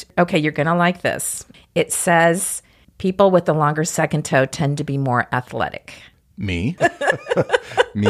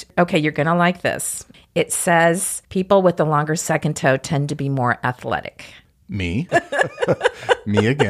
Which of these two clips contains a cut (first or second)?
second